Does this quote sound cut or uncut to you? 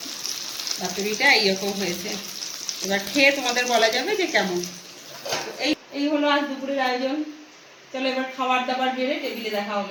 uncut